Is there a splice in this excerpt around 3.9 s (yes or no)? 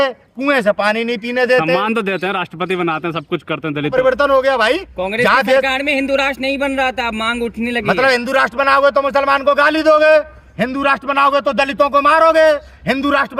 yes